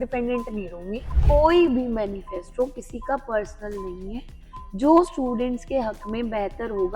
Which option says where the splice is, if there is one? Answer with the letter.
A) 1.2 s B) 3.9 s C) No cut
A